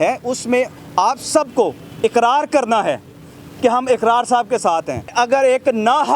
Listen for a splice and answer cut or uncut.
cut